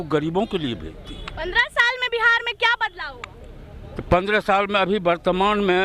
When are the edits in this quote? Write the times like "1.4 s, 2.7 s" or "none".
none